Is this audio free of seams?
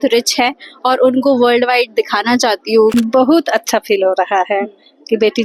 no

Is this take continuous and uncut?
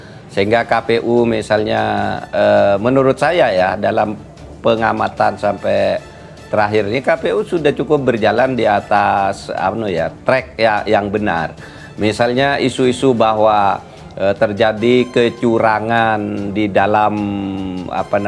yes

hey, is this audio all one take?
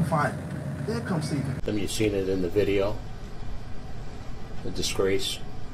no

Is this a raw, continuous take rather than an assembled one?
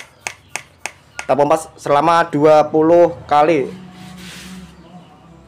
yes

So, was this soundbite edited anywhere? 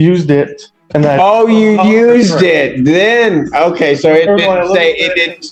no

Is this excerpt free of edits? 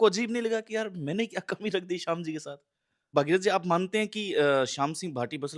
no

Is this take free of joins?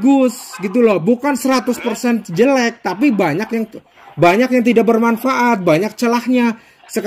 yes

